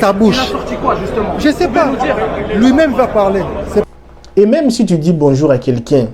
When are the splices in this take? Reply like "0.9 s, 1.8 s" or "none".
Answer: 3.8 s